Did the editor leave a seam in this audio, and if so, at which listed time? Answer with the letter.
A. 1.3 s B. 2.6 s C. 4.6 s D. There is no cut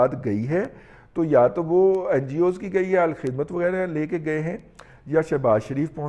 D